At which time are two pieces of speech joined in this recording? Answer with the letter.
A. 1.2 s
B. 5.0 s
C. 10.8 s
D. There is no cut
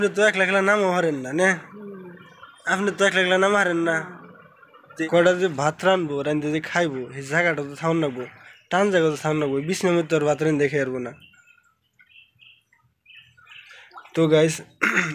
B